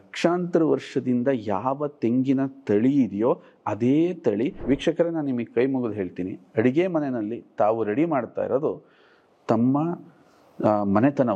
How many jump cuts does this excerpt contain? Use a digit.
1